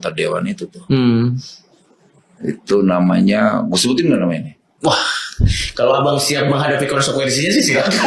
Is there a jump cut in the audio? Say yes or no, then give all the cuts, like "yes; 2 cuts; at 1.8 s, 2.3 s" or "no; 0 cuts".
no; 0 cuts